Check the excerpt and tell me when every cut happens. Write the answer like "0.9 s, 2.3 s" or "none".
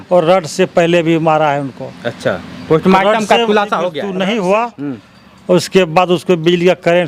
4.0 s